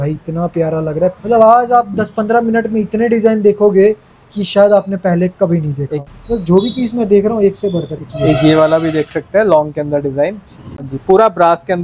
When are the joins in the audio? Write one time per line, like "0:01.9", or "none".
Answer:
0:01.2
0:05.9
0:08.0
0:10.9